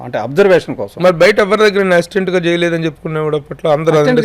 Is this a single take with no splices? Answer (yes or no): yes